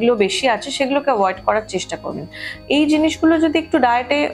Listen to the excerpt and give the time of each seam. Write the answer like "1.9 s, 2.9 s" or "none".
2.5 s